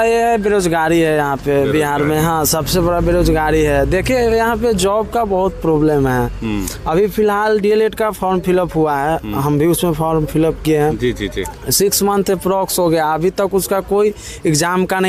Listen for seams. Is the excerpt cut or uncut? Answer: uncut